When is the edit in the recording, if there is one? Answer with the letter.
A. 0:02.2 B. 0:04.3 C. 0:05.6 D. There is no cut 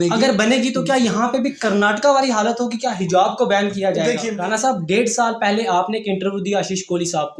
B